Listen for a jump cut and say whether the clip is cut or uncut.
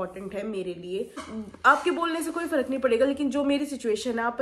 cut